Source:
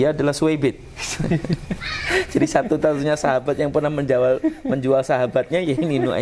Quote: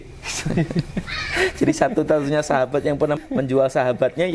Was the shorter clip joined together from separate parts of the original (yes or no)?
yes